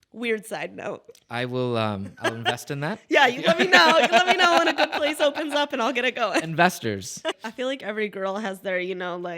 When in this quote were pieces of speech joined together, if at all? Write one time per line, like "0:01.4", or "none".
0:07.4